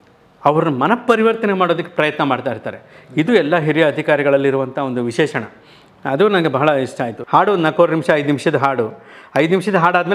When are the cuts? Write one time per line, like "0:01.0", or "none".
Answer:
0:07.1